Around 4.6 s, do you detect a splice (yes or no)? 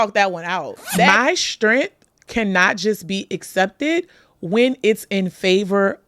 no